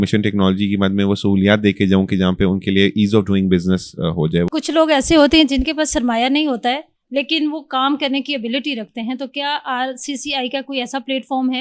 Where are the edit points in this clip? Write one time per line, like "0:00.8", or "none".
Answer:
0:04.5